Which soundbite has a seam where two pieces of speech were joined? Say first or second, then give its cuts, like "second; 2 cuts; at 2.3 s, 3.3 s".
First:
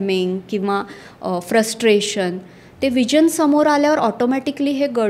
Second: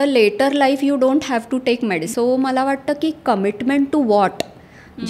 second; 1 cut; at 2.1 s